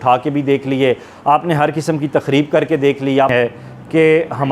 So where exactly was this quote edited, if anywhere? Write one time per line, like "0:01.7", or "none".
0:03.3